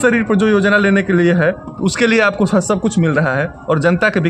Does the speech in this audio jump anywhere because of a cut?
no; 0 cuts

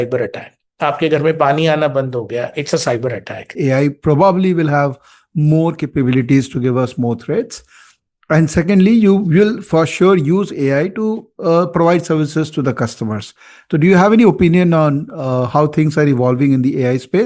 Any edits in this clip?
yes; 1 cut; at 3.5 s

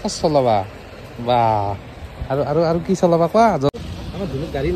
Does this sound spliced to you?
yes; 1 cut; at 3.8 s

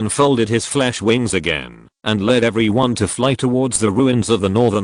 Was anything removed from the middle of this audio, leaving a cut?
no; 0 cuts

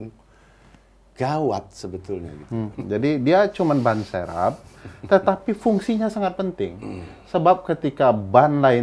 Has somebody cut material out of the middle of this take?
yes; 1 cut; at 2.8 s

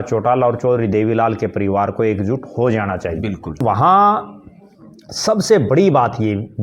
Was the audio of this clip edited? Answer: yes; 1 cut; at 3.6 s

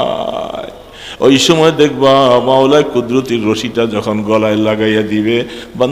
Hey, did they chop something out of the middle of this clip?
no; 0 cuts

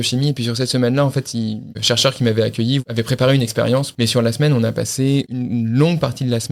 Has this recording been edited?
yes; 4 cuts; at 1.8 s, 2.8 s, 3.9 s, 5.3 s

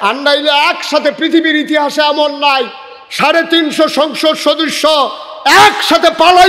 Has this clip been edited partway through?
no; 0 cuts

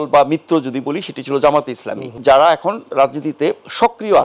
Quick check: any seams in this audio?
yes; 1 cut; at 2.1 s

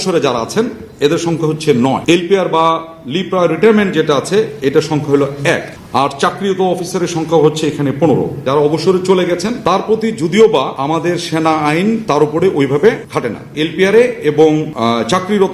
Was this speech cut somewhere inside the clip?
yes; 6 cuts; at 8.4 s, 9.5 s, 10.7 s, 12.0 s, 13.3 s, 14.7 s

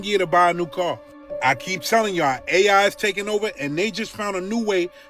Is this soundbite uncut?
yes; 0 cuts

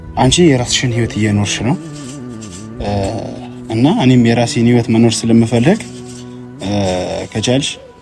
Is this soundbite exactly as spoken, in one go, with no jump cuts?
yes; 0 cuts

